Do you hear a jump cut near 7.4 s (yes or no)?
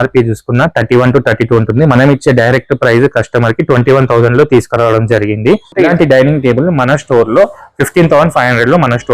no